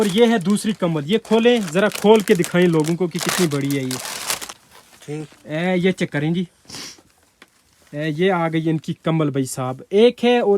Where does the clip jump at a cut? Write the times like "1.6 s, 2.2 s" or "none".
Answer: none